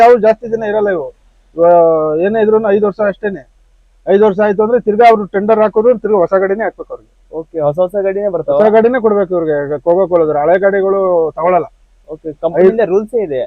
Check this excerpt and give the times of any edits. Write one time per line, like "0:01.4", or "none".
none